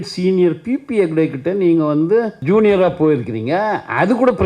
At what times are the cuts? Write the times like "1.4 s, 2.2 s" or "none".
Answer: 2.4 s